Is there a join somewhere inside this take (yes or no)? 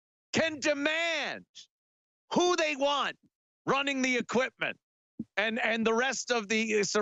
no